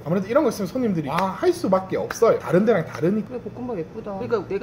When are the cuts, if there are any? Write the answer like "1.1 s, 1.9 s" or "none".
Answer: 3.3 s